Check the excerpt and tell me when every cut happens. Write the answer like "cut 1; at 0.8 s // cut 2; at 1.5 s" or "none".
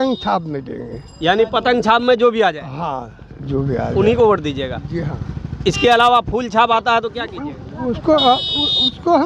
none